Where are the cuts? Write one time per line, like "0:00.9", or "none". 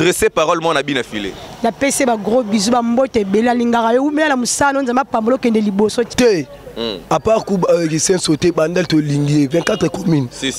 0:06.1